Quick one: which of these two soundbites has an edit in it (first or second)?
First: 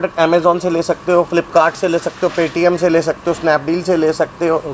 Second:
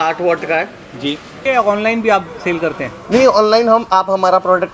second